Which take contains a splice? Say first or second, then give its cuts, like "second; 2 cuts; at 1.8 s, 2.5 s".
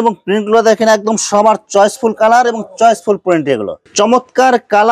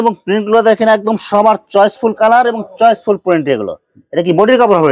first; 1 cut; at 3.8 s